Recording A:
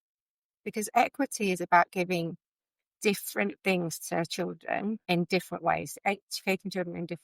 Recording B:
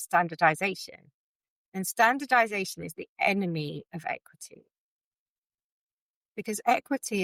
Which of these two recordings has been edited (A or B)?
A